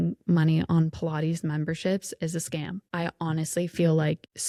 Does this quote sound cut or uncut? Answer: uncut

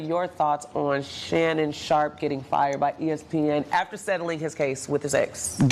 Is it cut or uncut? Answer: uncut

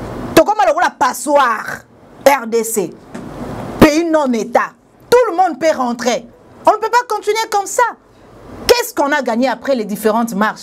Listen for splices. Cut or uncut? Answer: cut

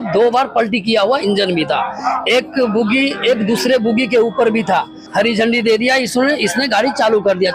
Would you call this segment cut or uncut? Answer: cut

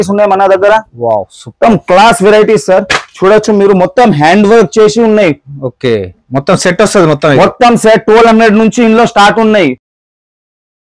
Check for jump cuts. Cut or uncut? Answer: uncut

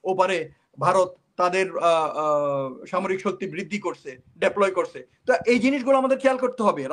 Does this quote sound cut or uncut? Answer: uncut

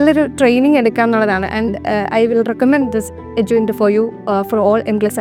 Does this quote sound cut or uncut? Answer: uncut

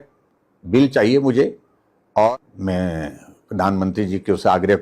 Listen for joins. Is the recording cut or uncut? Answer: cut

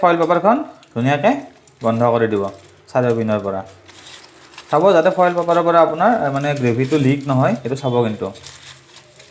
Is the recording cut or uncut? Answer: uncut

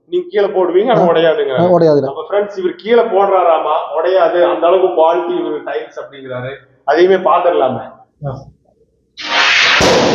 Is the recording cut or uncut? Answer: cut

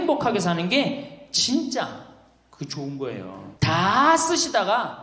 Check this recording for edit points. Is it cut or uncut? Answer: cut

